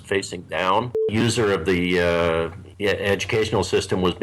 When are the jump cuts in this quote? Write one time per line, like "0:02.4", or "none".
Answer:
0:01.1
0:02.6